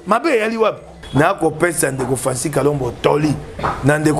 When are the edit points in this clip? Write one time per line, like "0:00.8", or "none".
0:00.9